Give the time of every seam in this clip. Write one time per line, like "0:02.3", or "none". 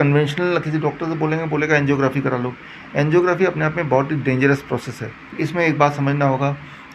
0:05.4